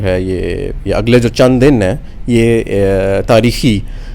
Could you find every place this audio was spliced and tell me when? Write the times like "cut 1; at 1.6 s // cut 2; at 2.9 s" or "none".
none